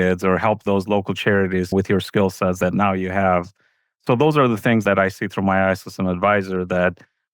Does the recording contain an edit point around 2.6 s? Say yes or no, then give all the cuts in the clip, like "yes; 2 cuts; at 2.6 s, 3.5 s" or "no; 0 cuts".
yes; 1 cut; at 2.6 s